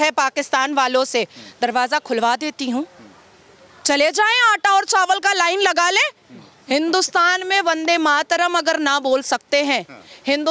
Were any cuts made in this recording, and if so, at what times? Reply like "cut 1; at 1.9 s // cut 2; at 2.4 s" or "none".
none